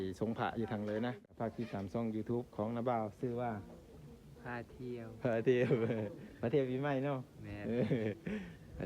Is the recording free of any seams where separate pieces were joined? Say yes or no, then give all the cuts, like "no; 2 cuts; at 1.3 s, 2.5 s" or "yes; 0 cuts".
no; 1 cut; at 1.2 s